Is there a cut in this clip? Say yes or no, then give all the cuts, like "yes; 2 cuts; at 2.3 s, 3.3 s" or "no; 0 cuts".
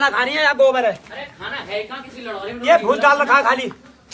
no; 0 cuts